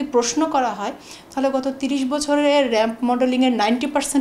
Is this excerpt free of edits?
yes; 0 cuts

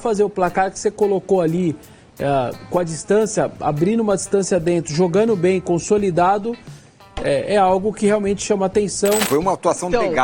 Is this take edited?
yes; 1 cut; at 9.2 s

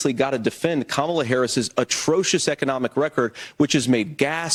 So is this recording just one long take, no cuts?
yes; 0 cuts

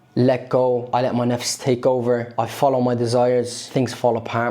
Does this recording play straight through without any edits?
no; 3 cuts; at 0.9 s, 2.3 s, 3.6 s

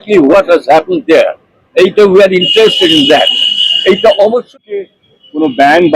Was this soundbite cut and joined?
yes; 1 cut; at 4.5 s

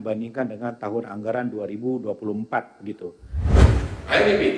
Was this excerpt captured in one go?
no; 1 cut; at 3.6 s

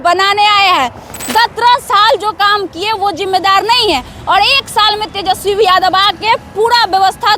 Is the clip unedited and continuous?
no; 1 cut; at 1.1 s

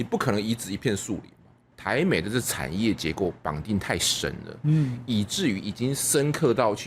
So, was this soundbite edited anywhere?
yes; 1 cut; at 1.7 s

